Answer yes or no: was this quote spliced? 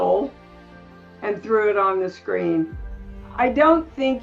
yes